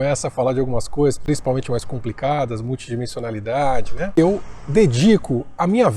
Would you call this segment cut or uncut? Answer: cut